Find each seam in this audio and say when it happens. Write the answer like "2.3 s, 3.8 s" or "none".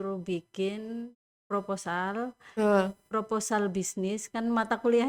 none